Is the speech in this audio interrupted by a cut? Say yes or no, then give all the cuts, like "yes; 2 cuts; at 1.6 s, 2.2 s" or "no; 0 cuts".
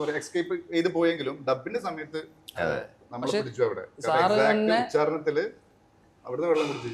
no; 0 cuts